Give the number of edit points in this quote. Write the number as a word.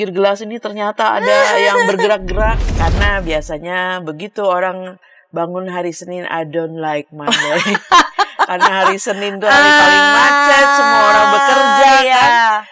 one